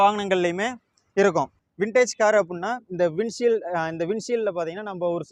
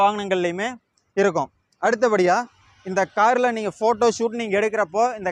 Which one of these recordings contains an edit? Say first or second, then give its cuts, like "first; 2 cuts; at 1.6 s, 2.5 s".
first; 1 cut; at 1.6 s